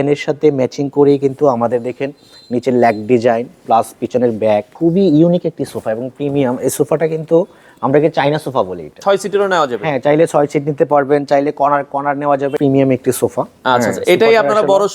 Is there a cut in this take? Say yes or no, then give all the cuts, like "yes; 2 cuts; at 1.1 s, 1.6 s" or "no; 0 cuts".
yes; 3 cuts; at 4.7 s, 8.9 s, 12.5 s